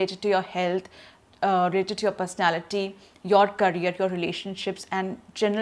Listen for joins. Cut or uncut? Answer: uncut